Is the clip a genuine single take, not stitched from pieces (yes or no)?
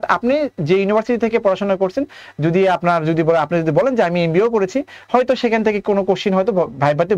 yes